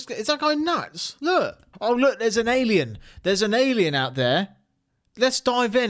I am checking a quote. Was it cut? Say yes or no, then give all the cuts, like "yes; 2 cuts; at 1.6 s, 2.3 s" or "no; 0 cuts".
yes; 1 cut; at 1.6 s